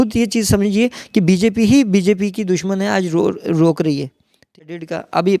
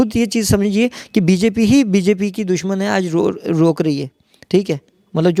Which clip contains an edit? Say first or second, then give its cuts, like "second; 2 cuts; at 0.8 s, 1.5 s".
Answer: first; 1 cut; at 4.5 s